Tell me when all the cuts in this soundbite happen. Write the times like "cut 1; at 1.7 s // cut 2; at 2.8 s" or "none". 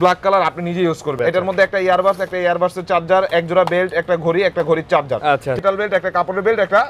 cut 1; at 1.1 s // cut 2; at 5.6 s